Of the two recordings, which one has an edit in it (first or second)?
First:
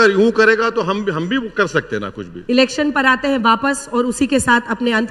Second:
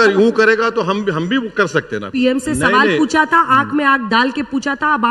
second